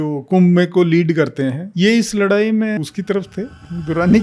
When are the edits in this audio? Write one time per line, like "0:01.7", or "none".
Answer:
0:01.6
0:02.8